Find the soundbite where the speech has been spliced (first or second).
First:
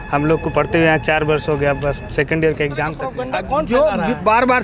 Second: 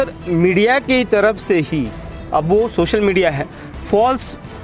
first